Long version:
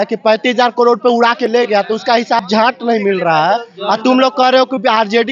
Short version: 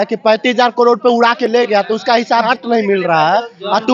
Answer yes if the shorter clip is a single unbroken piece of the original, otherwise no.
no